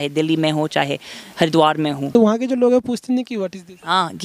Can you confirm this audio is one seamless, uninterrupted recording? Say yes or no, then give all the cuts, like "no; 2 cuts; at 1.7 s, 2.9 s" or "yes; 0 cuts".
no; 1 cut; at 2.2 s